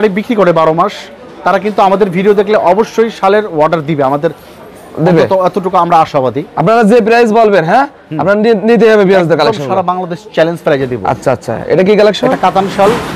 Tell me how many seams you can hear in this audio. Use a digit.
0